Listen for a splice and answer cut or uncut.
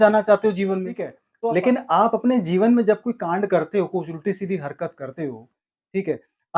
cut